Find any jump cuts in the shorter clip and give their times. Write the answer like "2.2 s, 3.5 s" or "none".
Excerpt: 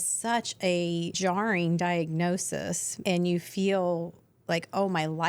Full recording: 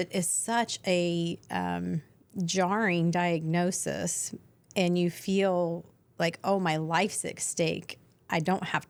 1.2 s, 2.9 s